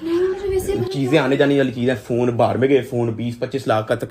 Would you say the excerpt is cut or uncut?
uncut